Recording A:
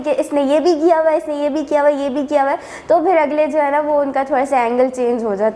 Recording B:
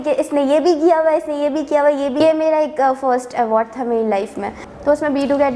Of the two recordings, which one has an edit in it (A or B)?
B